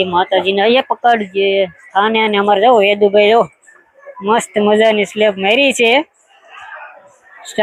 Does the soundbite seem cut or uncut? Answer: uncut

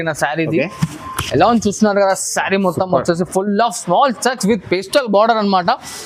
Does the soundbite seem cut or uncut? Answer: uncut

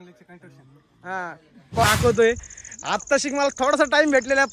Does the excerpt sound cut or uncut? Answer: cut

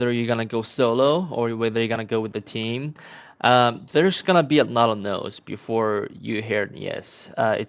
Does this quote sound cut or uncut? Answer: uncut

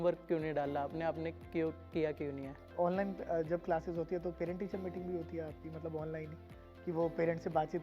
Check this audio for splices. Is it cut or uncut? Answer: uncut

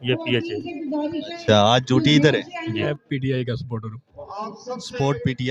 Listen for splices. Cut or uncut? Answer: cut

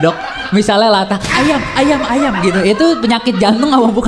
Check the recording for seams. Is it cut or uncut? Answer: uncut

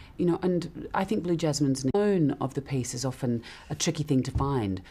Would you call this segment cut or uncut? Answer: uncut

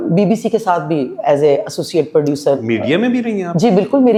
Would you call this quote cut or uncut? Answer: uncut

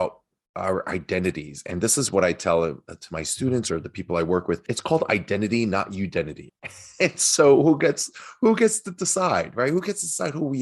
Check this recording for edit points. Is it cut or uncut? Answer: cut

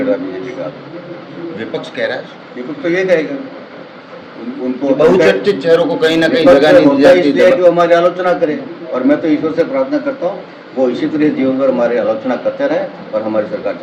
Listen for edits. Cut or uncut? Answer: uncut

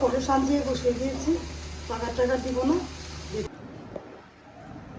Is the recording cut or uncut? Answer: cut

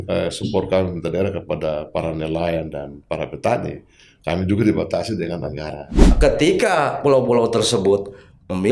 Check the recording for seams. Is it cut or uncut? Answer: cut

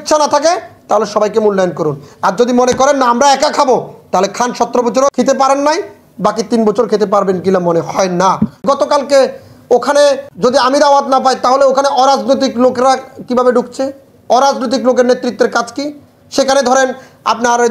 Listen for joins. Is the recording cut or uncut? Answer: cut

